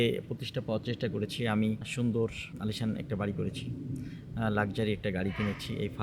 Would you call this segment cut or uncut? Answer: cut